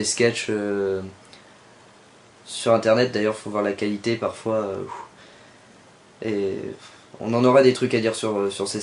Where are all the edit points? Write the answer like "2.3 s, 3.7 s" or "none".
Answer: 4.4 s